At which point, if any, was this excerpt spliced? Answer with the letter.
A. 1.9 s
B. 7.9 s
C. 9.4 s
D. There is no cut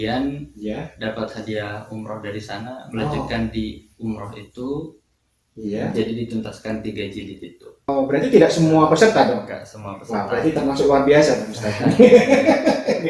B